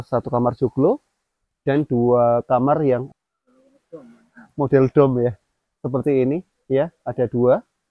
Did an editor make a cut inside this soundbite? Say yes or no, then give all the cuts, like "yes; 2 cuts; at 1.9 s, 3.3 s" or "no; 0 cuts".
yes; 1 cut; at 3.1 s